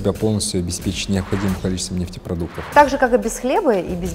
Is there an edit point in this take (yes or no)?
yes